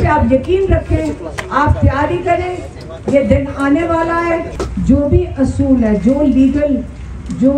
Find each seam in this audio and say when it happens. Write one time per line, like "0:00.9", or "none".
0:04.6